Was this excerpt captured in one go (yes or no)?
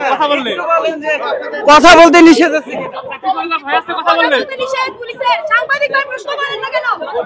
yes